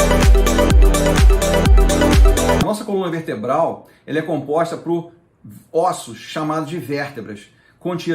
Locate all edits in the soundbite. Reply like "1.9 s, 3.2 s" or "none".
2.6 s